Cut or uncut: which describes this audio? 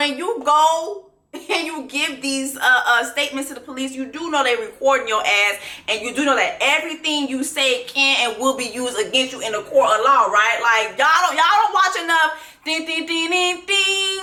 uncut